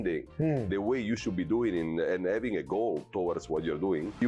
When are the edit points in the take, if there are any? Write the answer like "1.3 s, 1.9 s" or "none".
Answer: none

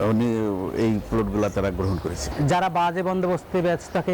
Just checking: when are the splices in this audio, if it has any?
2.2 s

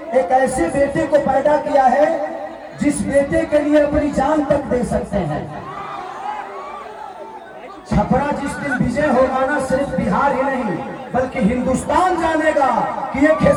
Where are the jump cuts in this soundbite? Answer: none

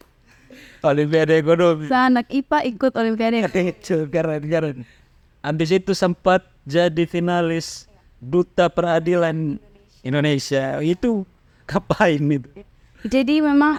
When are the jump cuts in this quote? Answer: none

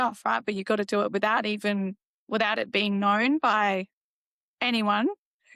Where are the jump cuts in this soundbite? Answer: none

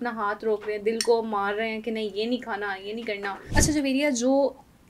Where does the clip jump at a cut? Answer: 3.4 s

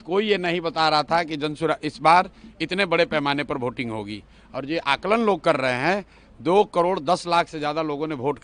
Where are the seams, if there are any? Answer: none

